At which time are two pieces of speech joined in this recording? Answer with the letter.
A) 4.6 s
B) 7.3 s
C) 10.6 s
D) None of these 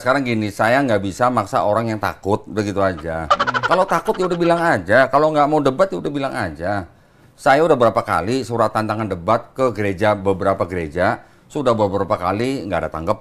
D